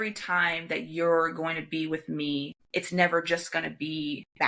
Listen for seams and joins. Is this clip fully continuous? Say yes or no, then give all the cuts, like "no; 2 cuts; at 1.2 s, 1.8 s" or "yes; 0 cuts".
no; 1 cut; at 2.6 s